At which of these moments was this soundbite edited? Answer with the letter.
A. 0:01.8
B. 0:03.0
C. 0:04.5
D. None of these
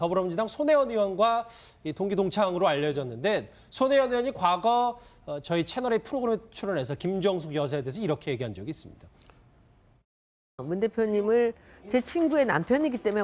D